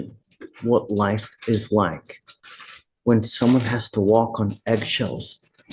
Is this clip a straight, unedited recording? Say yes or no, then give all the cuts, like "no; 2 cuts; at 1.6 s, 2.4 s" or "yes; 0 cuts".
yes; 0 cuts